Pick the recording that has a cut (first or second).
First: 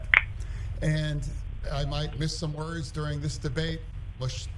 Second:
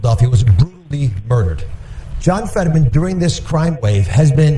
second